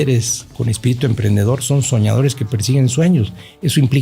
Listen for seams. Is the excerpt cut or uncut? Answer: uncut